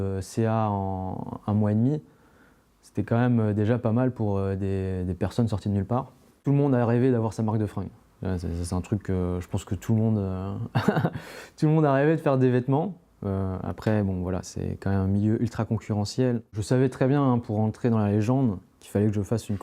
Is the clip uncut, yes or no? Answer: no